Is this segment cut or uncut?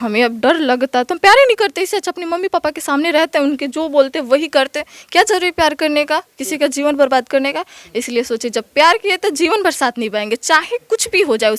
uncut